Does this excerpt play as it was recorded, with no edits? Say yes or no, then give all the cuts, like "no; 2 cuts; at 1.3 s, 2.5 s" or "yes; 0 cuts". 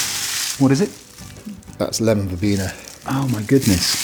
yes; 0 cuts